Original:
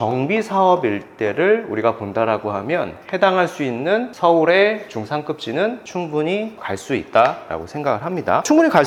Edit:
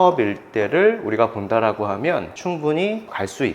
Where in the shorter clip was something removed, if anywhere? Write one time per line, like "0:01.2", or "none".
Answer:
0:02.3